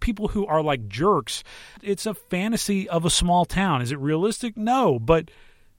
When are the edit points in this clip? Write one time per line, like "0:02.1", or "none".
0:01.7